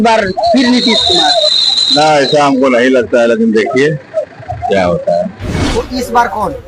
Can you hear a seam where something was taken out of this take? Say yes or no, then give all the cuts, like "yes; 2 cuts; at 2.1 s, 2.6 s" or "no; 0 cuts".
yes; 1 cut; at 5.4 s